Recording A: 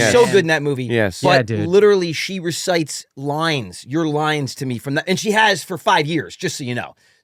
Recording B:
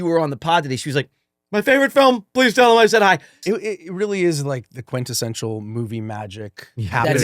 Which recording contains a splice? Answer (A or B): B